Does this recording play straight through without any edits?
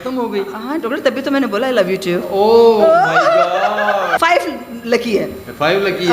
no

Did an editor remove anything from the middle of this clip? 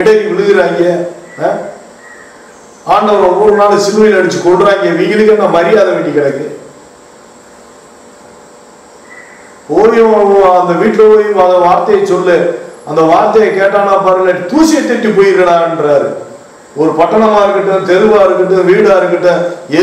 no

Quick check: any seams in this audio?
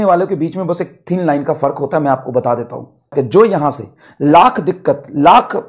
yes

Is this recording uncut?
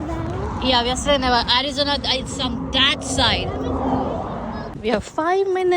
no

